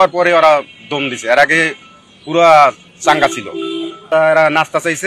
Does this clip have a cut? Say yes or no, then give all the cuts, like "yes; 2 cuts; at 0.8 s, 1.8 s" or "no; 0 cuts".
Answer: yes; 1 cut; at 4.0 s